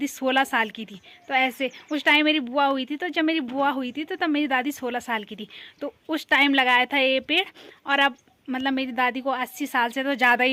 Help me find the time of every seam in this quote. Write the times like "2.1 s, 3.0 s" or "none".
none